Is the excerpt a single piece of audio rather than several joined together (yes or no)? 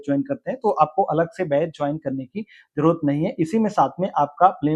yes